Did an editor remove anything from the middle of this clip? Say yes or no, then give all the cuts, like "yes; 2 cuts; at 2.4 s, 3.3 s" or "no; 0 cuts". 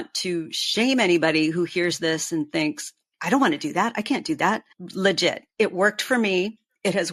no; 0 cuts